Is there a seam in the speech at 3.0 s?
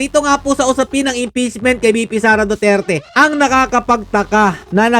yes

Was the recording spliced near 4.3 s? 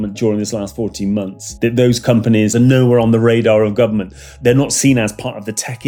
yes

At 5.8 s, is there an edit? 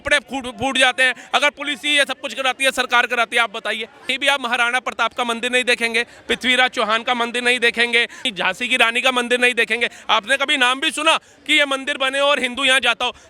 no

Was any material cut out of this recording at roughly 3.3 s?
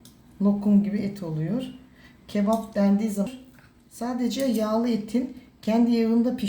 yes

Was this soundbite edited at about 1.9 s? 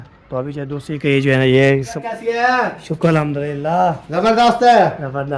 yes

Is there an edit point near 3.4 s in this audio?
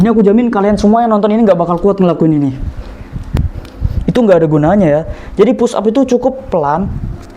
yes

